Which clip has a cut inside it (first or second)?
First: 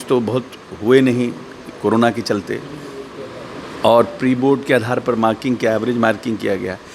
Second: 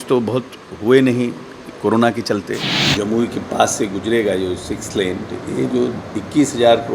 second